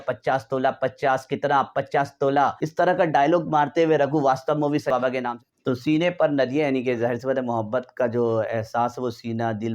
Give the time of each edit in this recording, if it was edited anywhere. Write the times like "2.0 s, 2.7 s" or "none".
2.6 s, 5.0 s